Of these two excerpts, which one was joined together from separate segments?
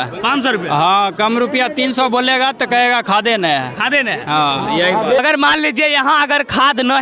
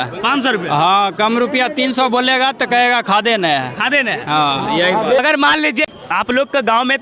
second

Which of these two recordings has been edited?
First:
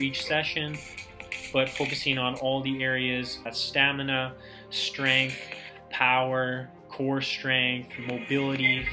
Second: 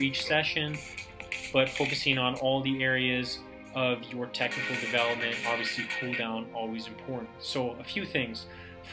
first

